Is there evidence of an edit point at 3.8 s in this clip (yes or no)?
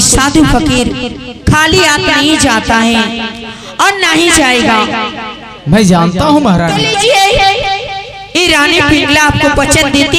no